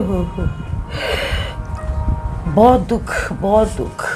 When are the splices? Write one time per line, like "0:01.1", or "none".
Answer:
none